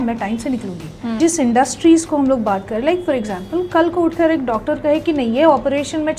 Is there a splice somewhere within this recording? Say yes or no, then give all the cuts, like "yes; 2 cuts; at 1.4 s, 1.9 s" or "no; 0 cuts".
yes; 1 cut; at 1.1 s